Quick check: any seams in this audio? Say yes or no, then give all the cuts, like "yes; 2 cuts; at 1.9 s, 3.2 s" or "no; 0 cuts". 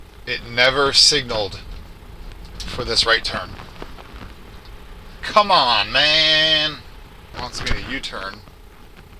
yes; 1 cut; at 7.3 s